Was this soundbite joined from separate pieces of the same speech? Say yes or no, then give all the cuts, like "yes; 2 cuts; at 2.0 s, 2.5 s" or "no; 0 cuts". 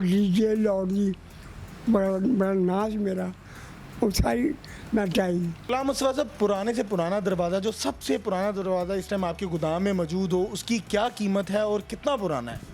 yes; 1 cut; at 5.6 s